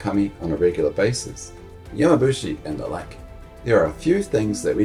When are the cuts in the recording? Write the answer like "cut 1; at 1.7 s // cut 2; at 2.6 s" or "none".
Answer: none